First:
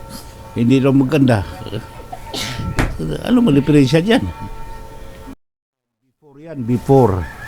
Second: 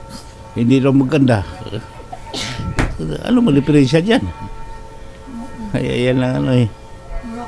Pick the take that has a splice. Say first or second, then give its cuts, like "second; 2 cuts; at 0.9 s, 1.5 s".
first; 1 cut; at 5.3 s